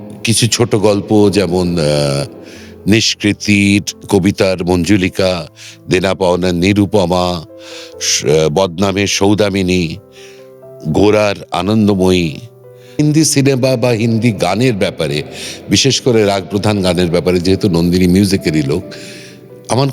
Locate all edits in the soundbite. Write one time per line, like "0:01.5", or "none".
0:13.0